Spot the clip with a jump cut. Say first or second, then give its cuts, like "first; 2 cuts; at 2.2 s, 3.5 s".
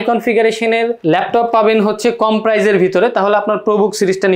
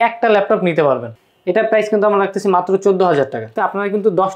second; 2 cuts; at 1.1 s, 3.5 s